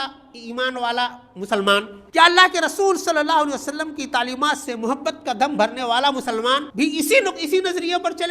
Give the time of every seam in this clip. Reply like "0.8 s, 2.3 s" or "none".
2.0 s, 6.7 s

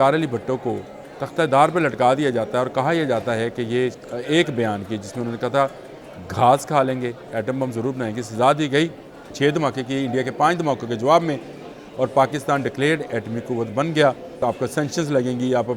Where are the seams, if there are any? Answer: 4.0 s, 9.2 s, 14.4 s

